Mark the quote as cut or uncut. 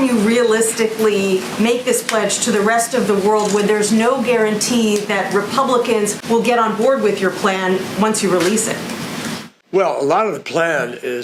uncut